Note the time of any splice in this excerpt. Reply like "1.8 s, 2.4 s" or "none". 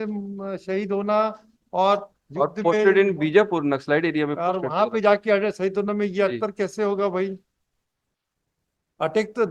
none